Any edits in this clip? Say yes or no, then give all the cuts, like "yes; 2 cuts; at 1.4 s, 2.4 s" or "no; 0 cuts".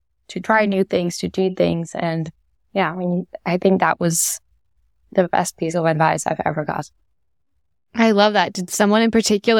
no; 0 cuts